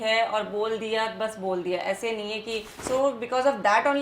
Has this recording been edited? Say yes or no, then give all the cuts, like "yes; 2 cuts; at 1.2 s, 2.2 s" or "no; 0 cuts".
yes; 1 cut; at 2.7 s